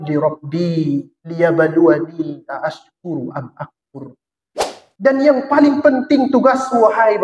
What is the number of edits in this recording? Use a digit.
1